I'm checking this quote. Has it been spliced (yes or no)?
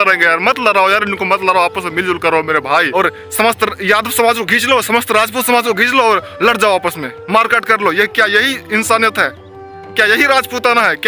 yes